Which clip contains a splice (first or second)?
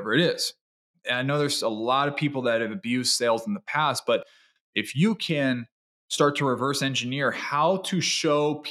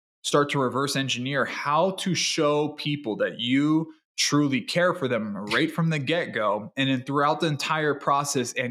first